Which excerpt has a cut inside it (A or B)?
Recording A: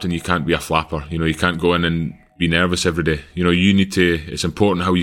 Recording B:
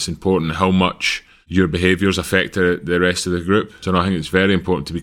B